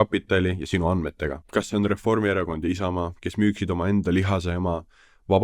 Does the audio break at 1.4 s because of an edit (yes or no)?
yes